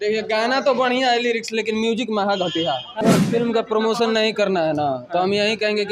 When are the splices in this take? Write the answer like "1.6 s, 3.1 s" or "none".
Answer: 3.0 s